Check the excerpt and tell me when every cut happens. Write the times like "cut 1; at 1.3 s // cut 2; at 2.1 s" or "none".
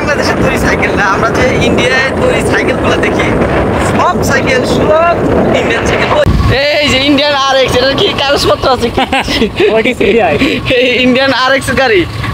cut 1; at 6.3 s

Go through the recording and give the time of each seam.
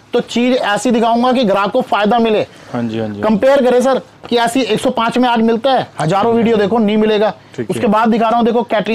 none

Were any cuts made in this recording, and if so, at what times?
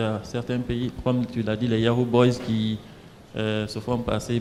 none

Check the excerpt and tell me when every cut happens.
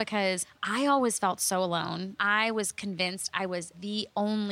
cut 1; at 2.1 s

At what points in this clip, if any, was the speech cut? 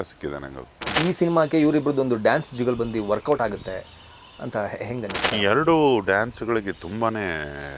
cut 1; at 0.9 s // cut 2; at 5.2 s

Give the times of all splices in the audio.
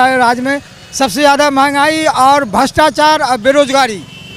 none

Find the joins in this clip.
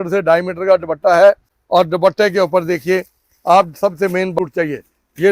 cut 1; at 1.5 s // cut 2; at 4.3 s

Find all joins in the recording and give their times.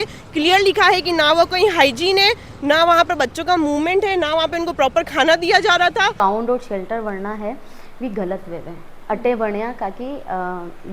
cut 1; at 6.2 s

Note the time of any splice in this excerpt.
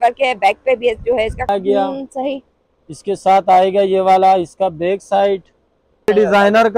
cut 1; at 1.5 s // cut 2; at 6.1 s

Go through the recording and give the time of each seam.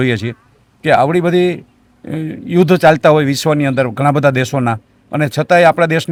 none

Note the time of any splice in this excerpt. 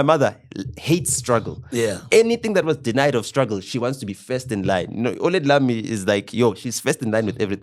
none

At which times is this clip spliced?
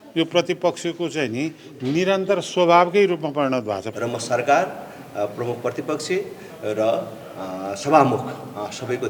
cut 1; at 3.9 s

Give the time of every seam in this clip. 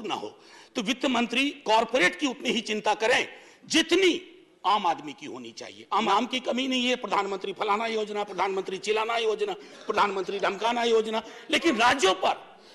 cut 1; at 6.1 s

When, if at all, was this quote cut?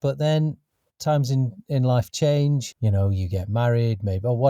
cut 1; at 2.7 s

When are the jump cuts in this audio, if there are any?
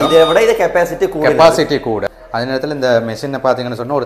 cut 1; at 2.0 s

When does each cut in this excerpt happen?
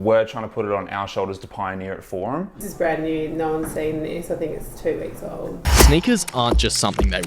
cut 1; at 2.7 s // cut 2; at 5.6 s

